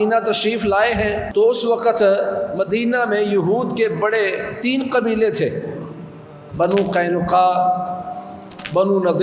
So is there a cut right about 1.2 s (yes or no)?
yes